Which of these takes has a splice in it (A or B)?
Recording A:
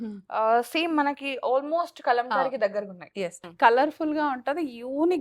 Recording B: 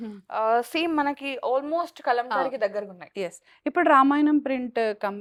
A